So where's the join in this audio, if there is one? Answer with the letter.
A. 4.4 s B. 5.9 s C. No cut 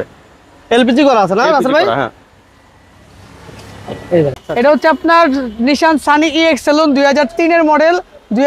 A